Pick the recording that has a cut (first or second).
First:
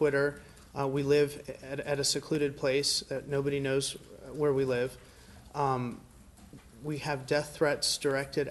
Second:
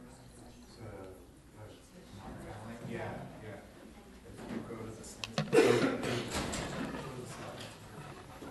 second